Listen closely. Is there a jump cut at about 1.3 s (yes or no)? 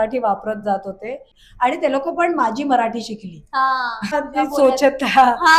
yes